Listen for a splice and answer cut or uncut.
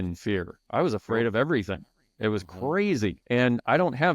cut